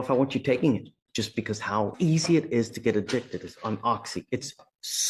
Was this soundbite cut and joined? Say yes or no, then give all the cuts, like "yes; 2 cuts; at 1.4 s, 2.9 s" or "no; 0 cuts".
yes; 1 cut; at 1.9 s